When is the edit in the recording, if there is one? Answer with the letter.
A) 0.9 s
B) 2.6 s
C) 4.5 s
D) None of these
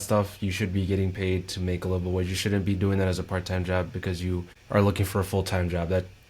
C